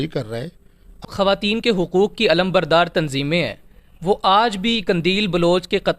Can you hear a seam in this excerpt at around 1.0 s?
yes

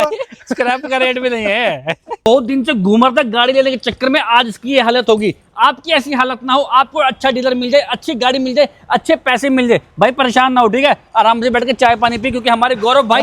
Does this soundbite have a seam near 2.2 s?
yes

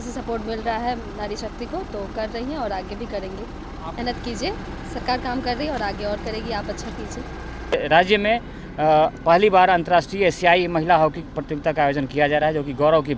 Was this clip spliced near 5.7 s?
no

